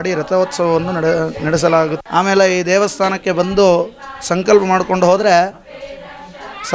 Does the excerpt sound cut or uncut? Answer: cut